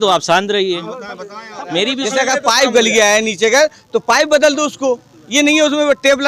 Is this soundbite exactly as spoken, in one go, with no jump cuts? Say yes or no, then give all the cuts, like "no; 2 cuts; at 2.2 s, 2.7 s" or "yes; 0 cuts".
no; 1 cut; at 2.0 s